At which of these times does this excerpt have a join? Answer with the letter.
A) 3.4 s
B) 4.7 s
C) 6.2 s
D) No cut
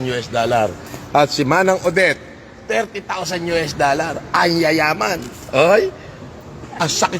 B